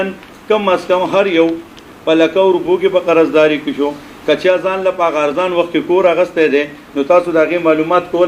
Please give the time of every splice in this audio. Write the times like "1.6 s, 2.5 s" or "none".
none